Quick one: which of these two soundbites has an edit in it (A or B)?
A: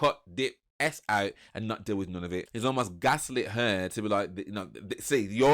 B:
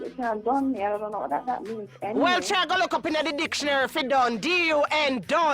A